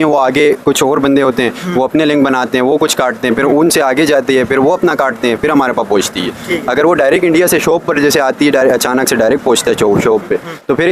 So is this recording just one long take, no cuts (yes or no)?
yes